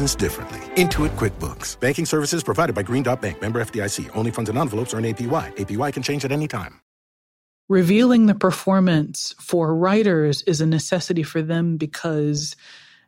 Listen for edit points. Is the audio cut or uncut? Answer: cut